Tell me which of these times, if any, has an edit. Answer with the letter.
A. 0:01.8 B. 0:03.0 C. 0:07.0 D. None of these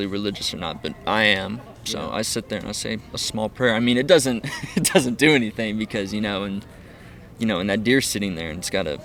D